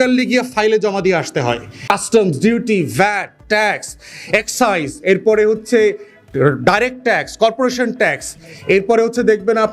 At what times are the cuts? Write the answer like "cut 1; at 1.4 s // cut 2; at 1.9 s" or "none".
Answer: cut 1; at 1.9 s